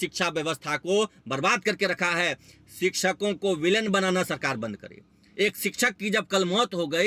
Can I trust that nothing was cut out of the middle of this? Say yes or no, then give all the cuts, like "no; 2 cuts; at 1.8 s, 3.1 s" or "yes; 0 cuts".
yes; 0 cuts